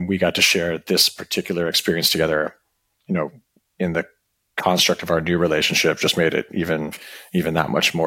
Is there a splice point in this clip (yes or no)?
no